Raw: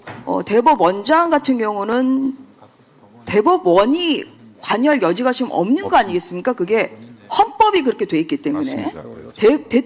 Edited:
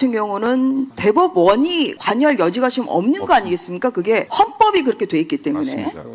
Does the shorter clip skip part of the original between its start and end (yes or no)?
yes